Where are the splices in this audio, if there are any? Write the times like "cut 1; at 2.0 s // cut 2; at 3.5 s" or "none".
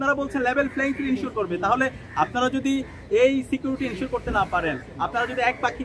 none

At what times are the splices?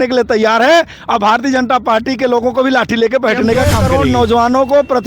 cut 1; at 3.9 s

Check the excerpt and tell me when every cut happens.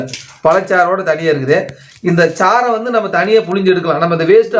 none

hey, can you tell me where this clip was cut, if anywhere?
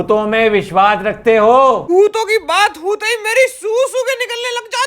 cut 1; at 1.8 s

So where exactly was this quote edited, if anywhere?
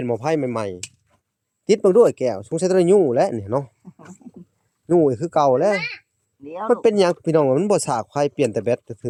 none

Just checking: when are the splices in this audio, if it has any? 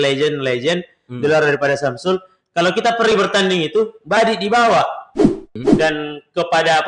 cut 1; at 5.5 s

